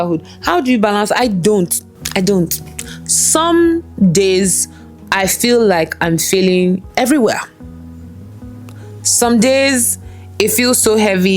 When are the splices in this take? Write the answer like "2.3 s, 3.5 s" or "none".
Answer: none